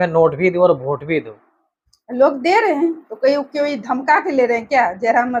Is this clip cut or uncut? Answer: uncut